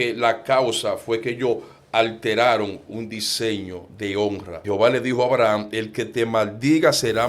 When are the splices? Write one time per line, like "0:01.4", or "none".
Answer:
0:04.5